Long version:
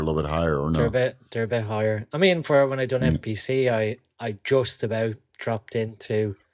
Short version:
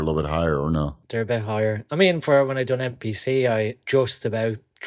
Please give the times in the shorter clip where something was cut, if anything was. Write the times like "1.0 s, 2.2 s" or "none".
0.9 s, 3.8 s